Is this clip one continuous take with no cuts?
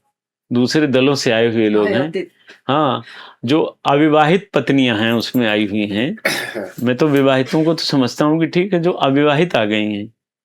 yes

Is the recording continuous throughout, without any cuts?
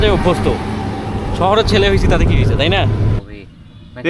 no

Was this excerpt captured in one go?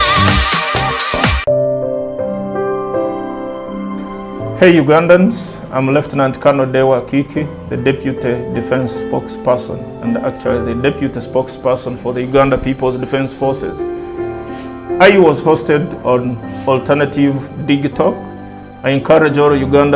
no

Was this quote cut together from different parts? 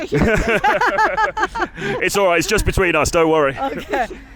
no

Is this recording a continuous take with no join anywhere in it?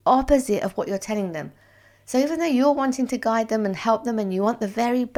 yes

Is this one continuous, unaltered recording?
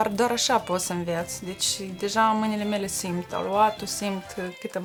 yes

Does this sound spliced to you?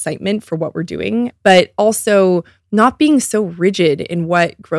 yes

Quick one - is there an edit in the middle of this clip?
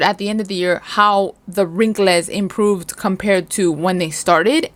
no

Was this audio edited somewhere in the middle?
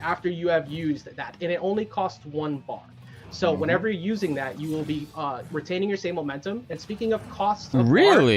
no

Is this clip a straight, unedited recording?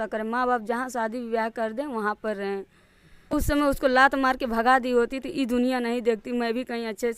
no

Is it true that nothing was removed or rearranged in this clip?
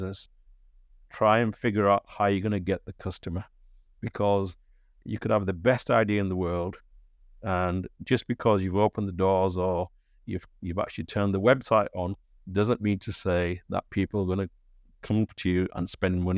yes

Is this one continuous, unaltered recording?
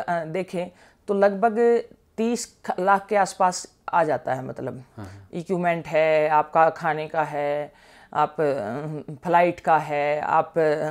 yes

